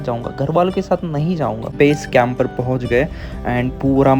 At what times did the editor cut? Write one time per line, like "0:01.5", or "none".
0:01.7